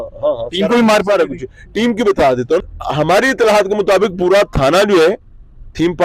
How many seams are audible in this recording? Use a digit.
1